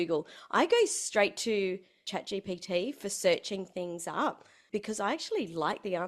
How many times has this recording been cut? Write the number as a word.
two